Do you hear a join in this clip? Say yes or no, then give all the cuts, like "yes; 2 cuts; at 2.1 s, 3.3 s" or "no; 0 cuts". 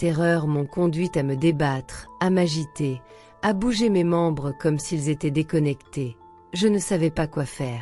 no; 0 cuts